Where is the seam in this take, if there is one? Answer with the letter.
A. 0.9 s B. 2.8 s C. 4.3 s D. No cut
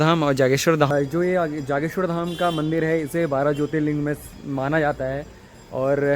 A